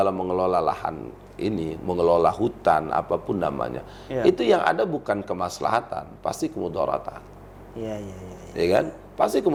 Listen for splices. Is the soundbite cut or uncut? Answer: uncut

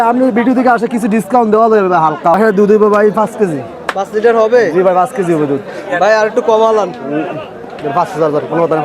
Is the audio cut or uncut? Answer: cut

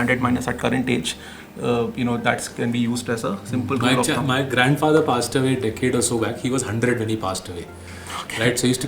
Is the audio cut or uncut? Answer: uncut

